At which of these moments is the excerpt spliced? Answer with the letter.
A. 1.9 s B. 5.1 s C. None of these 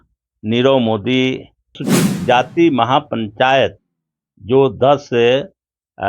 A